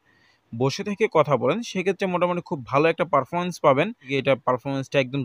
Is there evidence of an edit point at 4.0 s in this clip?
yes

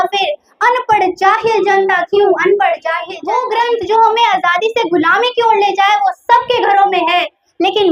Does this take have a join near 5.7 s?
no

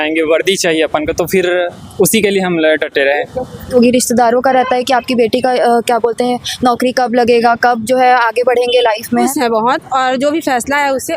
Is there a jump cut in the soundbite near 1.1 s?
no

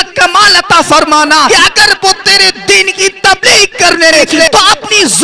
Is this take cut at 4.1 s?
yes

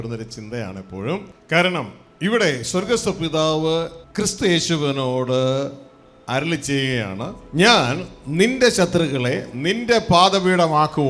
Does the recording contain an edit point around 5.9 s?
no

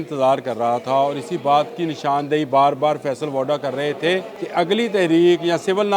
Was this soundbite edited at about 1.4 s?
no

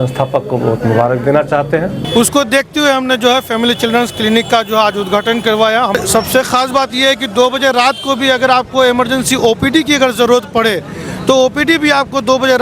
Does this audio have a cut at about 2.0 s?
yes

